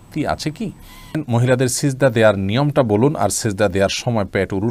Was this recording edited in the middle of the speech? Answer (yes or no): yes